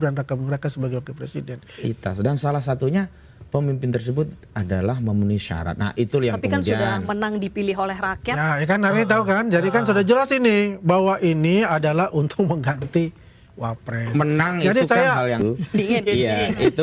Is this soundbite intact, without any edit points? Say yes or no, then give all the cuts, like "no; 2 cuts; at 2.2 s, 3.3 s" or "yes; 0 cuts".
no; 2 cuts; at 1.8 s, 15.4 s